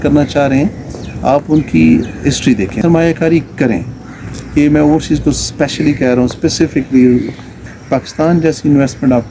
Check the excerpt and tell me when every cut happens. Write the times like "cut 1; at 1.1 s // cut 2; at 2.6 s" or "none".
cut 1; at 2.8 s // cut 2; at 7.5 s

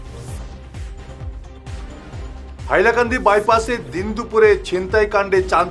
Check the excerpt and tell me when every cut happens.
cut 1; at 1.3 s

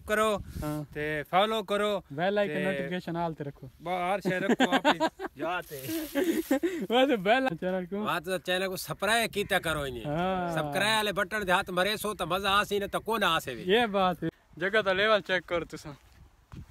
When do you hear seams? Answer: cut 1; at 7.5 s // cut 2; at 14.2 s

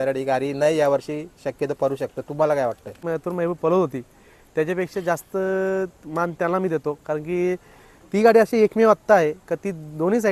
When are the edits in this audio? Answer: cut 1; at 3.0 s

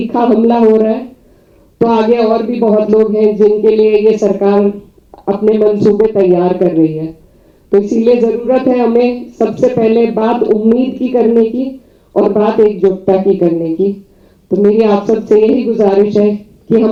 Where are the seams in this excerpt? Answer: none

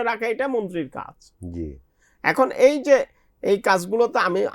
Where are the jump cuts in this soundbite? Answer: none

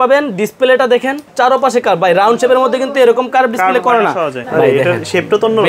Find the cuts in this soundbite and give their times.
cut 1; at 1.3 s // cut 2; at 4.4 s

